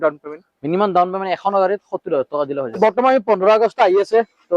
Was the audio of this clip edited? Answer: yes; 1 cut; at 2.8 s

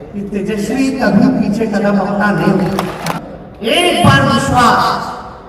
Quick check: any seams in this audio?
yes; 1 cut; at 3.1 s

